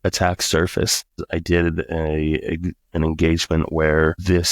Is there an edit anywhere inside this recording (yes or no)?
yes